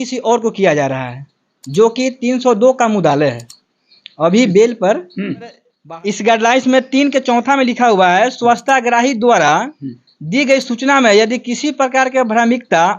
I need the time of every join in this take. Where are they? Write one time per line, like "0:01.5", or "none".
0:05.8